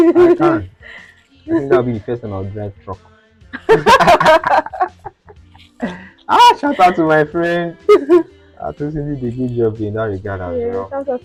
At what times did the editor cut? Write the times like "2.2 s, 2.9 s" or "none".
none